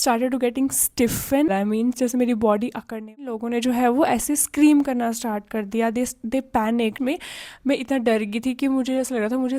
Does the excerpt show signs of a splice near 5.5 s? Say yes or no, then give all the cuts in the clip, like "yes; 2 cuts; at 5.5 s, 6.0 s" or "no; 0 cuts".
no; 3 cuts; at 1.5 s, 3.3 s, 7.0 s